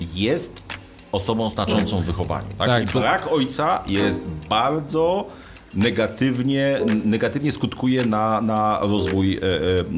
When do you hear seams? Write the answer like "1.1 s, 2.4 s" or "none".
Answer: none